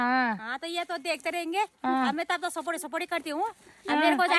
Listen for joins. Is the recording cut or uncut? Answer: uncut